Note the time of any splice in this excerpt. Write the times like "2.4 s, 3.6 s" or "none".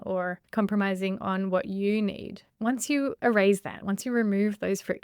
2.5 s